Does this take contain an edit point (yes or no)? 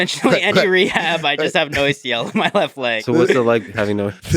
no